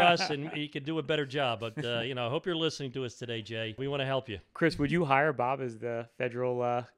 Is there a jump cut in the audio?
yes; 1 cut; at 3.8 s

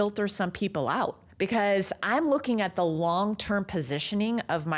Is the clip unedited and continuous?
yes; 0 cuts

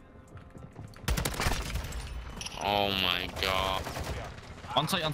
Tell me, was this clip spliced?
yes; 1 cut; at 4.2 s

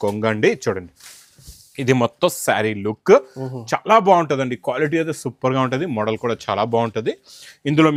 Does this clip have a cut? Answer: no; 0 cuts

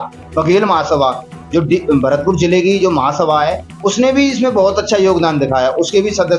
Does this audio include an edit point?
no; 0 cuts

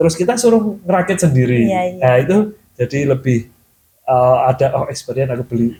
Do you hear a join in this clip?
no; 0 cuts

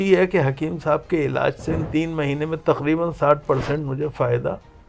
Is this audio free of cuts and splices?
no; 1 cut; at 1.8 s

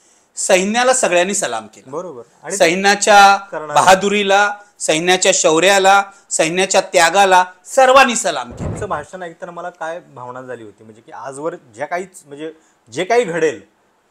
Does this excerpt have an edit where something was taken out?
yes; 1 cut; at 8.7 s

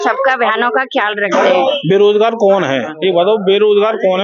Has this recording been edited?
yes; 2 cuts; at 1.7 s, 2.9 s

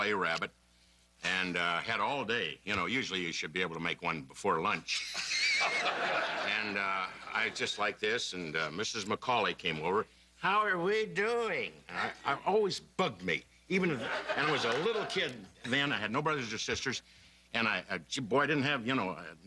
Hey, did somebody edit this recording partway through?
no; 0 cuts

